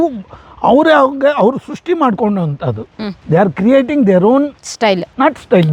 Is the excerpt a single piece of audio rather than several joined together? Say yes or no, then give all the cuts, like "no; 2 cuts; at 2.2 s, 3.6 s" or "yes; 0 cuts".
yes; 0 cuts